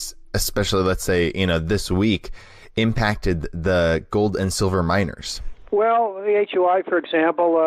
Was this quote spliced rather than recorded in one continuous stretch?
no; 0 cuts

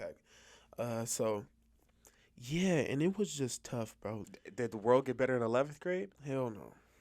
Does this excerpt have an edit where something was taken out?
yes; 1 cut; at 4.2 s

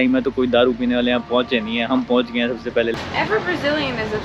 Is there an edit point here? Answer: yes; 1 cut; at 2.9 s

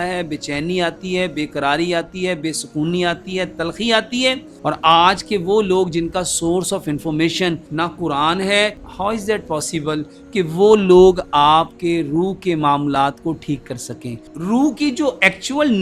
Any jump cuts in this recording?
yes; 4 cuts; at 4.5 s, 7.6 s, 8.8 s, 14.3 s

